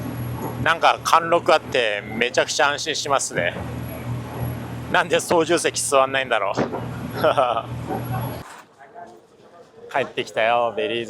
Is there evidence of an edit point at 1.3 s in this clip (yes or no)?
no